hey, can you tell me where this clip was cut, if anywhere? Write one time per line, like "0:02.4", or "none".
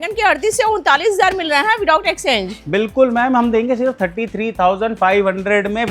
none

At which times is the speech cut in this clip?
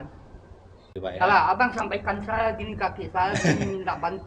0:00.9

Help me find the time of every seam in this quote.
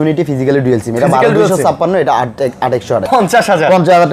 0:03.0

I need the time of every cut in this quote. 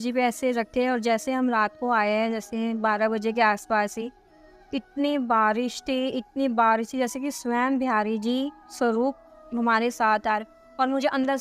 none

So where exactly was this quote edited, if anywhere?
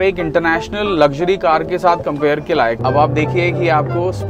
0:02.8

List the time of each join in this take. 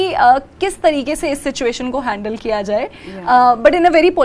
none

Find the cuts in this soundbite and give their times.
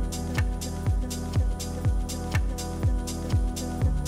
none

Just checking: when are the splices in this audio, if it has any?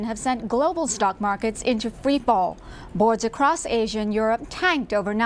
none

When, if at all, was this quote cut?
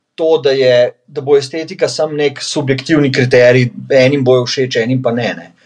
none

